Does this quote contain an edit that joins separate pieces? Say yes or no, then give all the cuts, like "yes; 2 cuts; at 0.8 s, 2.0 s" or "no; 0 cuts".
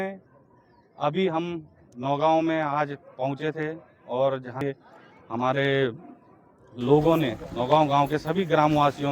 yes; 1 cut; at 4.6 s